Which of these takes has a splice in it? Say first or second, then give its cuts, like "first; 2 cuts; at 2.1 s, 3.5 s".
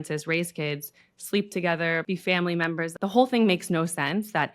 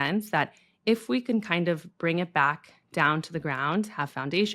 first; 2 cuts; at 2.0 s, 2.9 s